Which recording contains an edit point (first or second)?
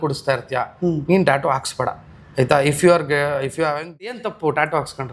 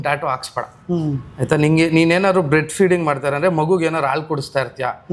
first